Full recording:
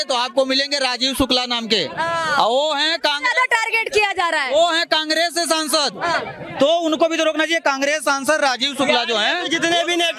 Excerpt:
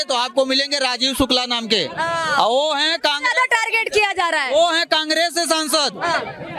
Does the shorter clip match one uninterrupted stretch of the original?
yes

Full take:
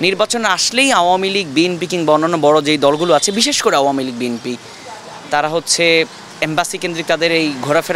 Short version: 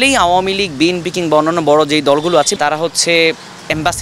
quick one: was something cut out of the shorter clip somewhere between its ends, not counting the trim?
yes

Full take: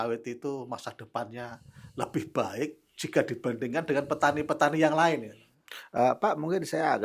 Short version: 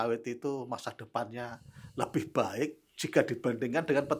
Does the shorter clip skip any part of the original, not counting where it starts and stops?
no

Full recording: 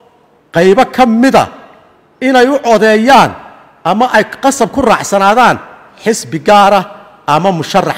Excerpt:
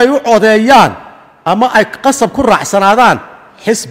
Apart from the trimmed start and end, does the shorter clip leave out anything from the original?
no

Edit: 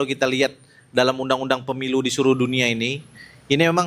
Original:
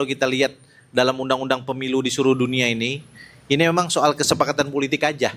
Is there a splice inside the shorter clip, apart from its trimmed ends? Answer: no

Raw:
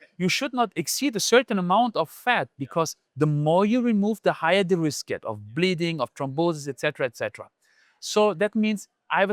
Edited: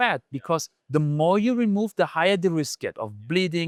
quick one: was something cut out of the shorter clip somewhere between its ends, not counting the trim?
no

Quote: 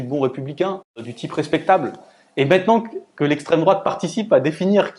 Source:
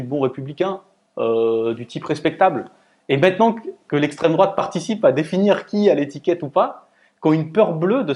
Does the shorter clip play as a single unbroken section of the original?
no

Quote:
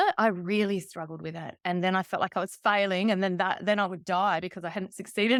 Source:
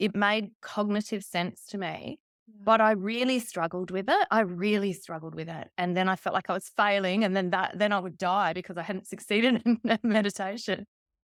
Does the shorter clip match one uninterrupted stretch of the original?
yes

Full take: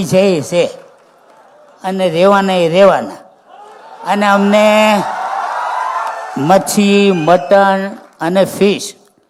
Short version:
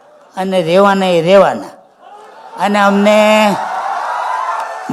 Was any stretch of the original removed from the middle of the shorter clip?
no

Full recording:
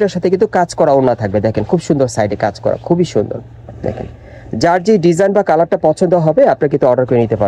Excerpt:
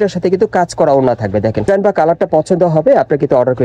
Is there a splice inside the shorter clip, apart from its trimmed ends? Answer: yes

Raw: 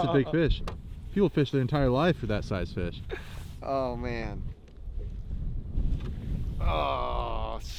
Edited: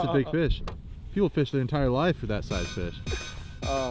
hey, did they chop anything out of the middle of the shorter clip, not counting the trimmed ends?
no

